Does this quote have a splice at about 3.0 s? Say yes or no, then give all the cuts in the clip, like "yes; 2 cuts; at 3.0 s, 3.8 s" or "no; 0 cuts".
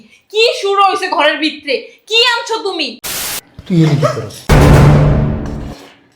yes; 1 cut; at 3.0 s